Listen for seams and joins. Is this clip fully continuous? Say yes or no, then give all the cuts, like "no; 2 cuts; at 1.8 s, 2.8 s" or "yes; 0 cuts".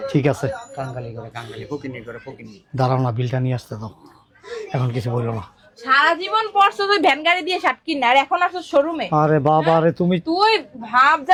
yes; 0 cuts